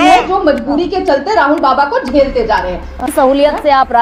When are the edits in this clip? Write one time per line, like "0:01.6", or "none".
0:03.1

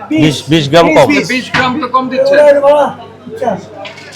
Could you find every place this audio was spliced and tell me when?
none

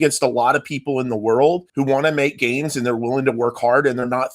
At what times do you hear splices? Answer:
0:01.7

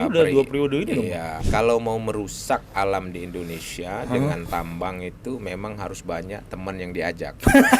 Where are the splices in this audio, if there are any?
0:01.3

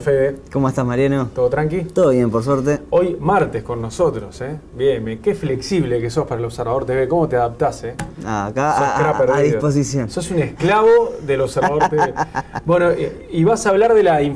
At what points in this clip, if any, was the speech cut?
0:07.4

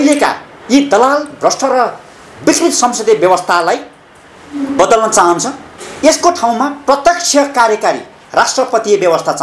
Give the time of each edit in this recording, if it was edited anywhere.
none

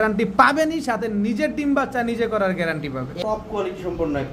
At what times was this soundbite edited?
0:03.1

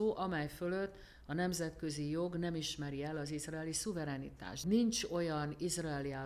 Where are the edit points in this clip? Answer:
0:04.6

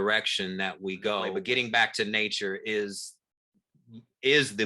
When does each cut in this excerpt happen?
0:01.4

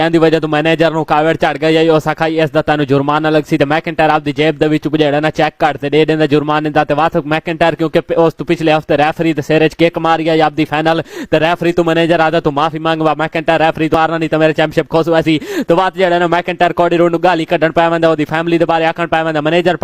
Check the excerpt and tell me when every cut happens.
0:13.9

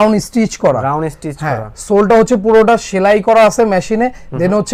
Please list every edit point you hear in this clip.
none

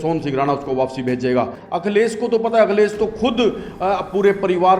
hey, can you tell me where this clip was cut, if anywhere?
0:01.6

